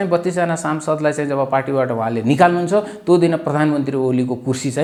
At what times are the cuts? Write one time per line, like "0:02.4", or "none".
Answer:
none